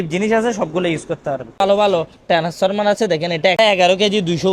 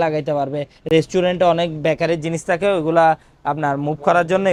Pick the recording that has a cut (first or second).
first